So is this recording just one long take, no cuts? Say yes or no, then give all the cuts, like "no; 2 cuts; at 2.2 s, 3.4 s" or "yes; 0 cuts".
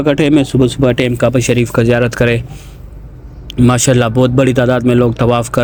yes; 0 cuts